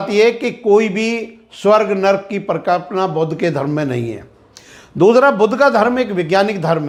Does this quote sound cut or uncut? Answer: uncut